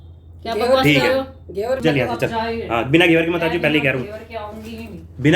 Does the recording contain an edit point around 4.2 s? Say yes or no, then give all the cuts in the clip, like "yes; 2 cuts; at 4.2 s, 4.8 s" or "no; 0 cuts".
no; 1 cut; at 1.8 s